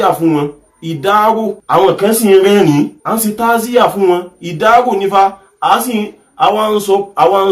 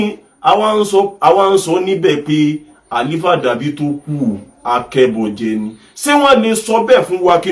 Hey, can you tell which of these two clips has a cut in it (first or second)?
first